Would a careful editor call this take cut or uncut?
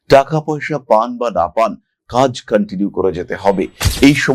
uncut